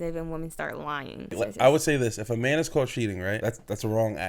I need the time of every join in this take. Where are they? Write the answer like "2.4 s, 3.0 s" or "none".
1.3 s, 3.4 s